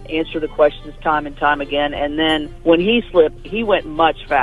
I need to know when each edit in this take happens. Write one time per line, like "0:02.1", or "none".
0:02.5
0:03.5

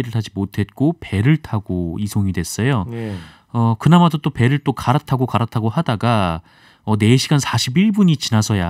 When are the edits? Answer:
none

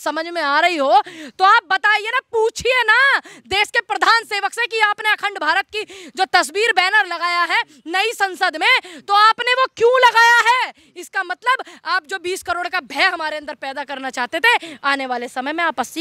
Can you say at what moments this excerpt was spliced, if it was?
none

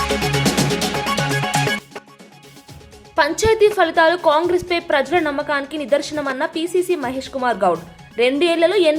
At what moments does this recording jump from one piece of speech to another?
none

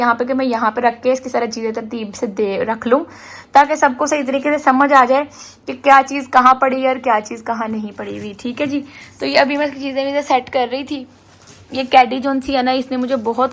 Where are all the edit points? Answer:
none

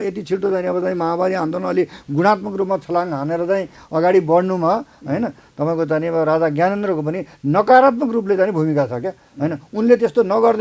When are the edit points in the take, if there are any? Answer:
none

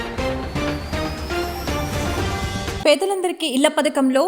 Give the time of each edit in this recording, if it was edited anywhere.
0:02.8

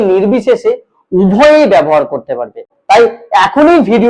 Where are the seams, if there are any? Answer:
0:02.7

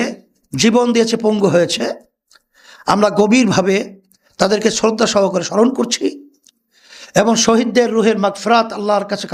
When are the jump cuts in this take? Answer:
none

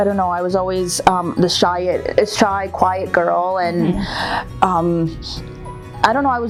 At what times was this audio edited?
none

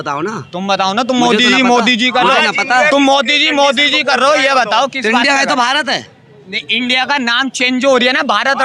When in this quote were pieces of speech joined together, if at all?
none

